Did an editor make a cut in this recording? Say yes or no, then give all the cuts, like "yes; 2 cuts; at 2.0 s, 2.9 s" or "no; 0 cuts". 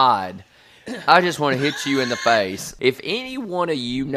yes; 1 cut; at 2.7 s